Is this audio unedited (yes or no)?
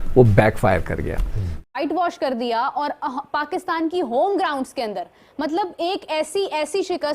no